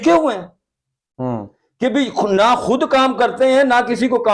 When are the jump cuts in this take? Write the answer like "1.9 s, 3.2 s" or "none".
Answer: none